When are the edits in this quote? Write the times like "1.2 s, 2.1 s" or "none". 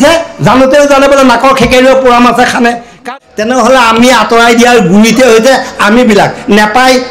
3.1 s